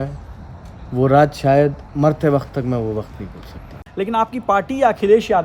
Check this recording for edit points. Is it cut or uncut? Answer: cut